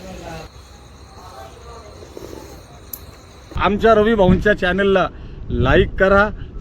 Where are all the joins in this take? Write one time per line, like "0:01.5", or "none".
0:03.5